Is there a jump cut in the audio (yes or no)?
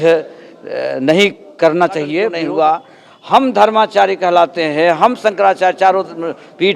yes